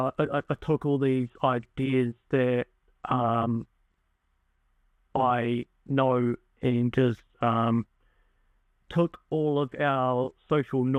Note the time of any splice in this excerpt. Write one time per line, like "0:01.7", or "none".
none